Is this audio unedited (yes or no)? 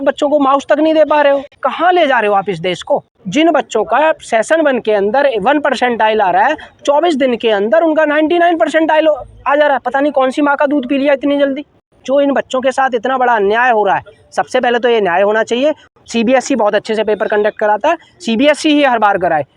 no